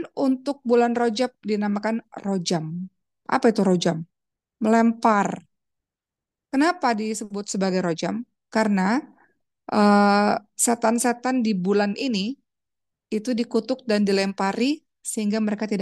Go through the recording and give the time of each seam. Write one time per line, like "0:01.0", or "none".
none

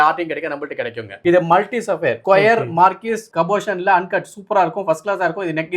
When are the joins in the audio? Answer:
0:01.1

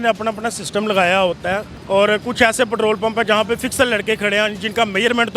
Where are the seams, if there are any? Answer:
0:01.7

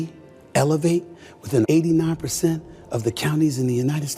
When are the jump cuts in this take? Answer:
0:01.6

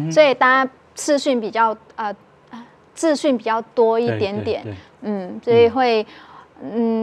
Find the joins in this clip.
none

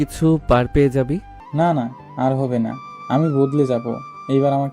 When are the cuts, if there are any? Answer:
0:01.4

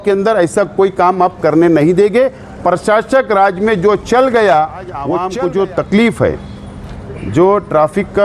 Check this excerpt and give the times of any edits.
0:05.1

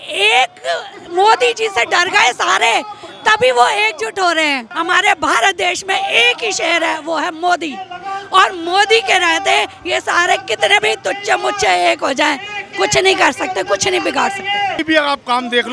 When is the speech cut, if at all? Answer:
0:04.7
0:14.8

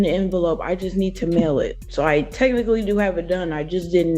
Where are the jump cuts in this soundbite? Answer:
0:01.8

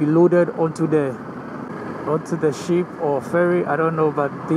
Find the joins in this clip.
none

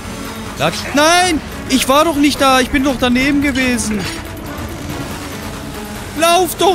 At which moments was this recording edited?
none

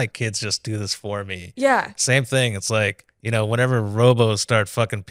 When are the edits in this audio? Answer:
none

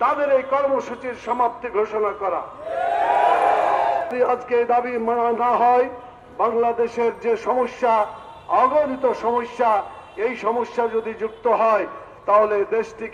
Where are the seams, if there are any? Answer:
0:04.1

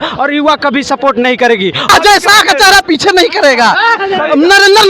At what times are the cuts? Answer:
0:01.9

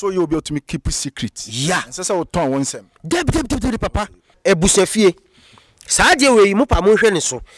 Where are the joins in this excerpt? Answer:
0:04.4

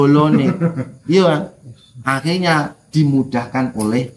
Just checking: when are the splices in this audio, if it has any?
none

